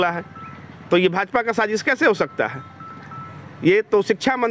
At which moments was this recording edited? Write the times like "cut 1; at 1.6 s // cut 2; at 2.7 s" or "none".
none